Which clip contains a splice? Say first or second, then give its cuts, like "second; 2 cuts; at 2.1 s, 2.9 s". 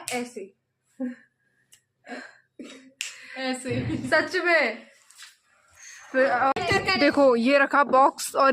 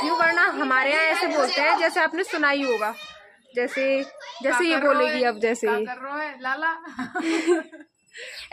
first; 1 cut; at 6.5 s